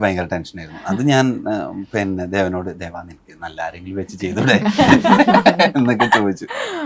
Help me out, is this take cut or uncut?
uncut